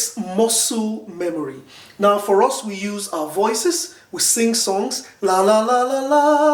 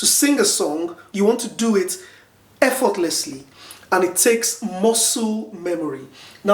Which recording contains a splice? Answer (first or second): second